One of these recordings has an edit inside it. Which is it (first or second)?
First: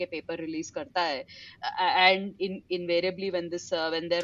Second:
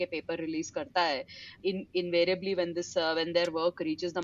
second